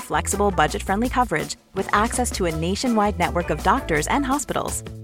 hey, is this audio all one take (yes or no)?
yes